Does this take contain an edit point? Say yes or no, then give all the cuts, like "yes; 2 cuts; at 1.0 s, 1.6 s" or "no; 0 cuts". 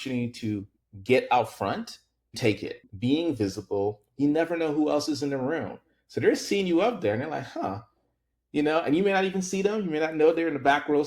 yes; 1 cut; at 2.6 s